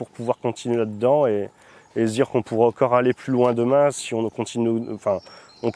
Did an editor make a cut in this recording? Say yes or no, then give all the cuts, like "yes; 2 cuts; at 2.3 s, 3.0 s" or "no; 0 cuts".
no; 0 cuts